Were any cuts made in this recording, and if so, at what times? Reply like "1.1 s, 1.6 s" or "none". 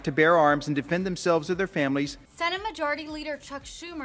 2.2 s